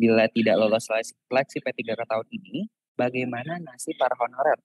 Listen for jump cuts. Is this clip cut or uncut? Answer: uncut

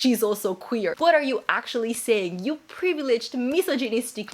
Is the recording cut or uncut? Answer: cut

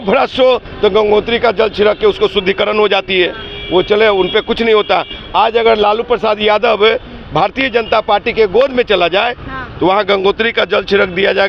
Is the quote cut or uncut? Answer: uncut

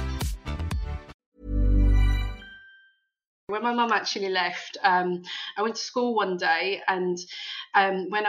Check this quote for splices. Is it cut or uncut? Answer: cut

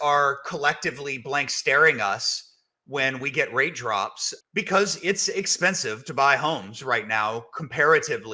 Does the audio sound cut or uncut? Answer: uncut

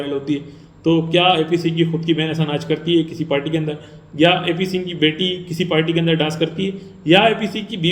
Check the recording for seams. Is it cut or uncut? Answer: uncut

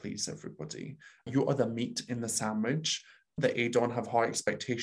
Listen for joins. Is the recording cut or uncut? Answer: uncut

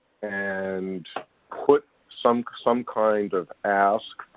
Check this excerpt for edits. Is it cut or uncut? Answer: uncut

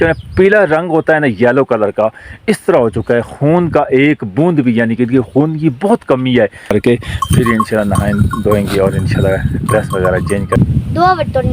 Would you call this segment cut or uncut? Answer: cut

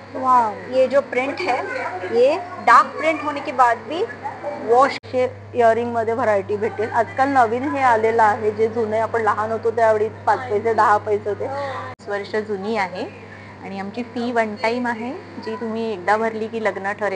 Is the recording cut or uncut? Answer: cut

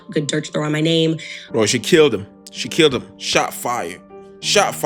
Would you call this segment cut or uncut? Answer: cut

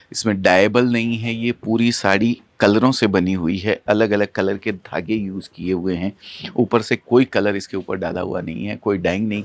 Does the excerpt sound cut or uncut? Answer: uncut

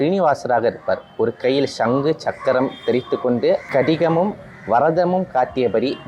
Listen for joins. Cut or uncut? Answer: cut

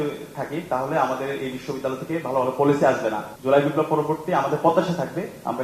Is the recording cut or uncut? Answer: cut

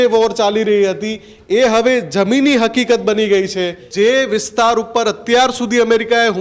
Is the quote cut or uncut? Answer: cut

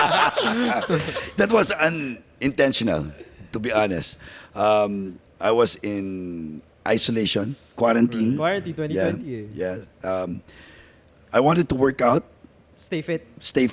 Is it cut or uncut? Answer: uncut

